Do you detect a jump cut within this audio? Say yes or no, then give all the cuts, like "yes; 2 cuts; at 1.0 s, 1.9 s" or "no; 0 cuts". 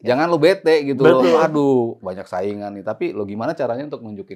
no; 0 cuts